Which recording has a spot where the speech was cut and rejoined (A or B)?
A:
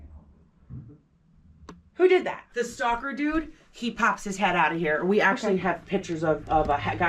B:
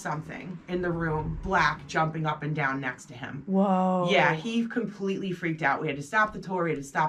A